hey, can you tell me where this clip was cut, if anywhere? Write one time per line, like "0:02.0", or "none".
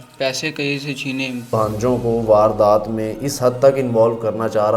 0:01.5